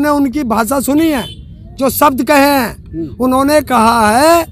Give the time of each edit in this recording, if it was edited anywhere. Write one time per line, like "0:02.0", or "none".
none